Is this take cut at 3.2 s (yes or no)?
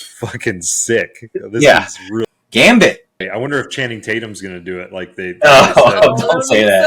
yes